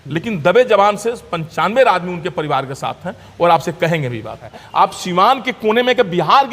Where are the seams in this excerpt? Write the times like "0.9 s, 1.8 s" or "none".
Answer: 4.5 s